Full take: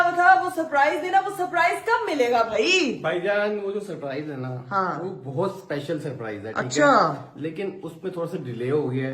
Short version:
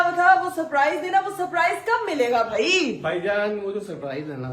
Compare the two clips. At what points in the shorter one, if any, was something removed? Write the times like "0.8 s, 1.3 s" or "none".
none